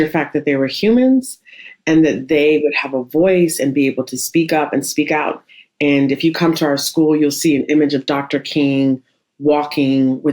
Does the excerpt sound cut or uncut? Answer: cut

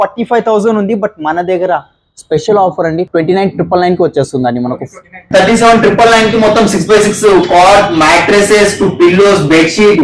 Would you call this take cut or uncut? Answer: cut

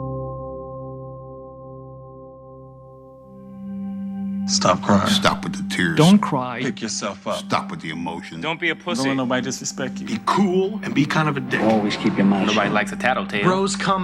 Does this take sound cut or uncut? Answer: uncut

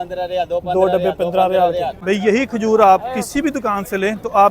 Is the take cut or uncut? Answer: cut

